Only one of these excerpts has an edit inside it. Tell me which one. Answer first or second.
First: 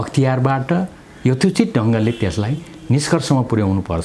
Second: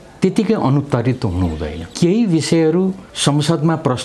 second